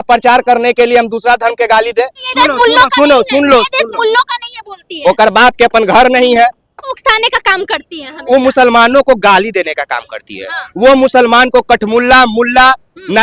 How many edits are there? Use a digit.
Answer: 2